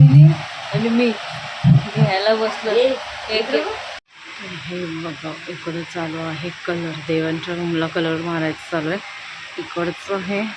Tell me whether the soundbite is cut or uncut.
cut